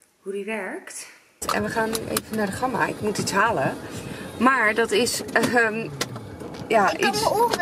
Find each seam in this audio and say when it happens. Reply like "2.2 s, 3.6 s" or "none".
1.4 s